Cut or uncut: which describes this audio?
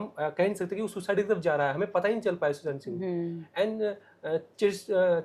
uncut